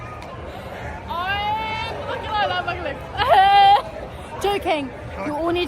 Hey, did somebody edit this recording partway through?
yes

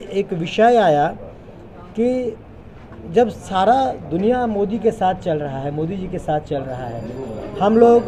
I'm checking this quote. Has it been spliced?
no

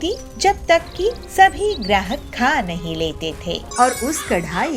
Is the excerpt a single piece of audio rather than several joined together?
no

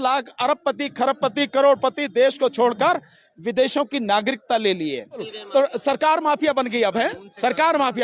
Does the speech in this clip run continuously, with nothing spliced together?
no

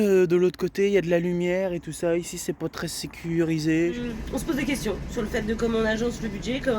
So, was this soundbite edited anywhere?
yes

